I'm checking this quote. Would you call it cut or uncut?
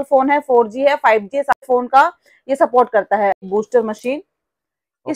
cut